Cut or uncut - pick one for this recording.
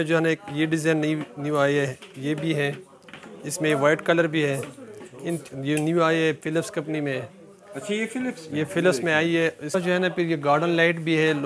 cut